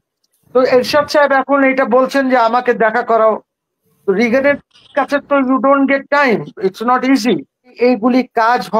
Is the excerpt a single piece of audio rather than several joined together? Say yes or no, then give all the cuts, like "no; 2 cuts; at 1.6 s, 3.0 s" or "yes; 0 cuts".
no; 1 cut; at 7.7 s